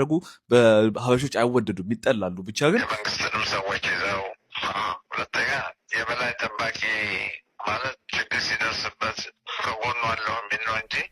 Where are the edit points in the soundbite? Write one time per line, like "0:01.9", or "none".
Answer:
0:03.0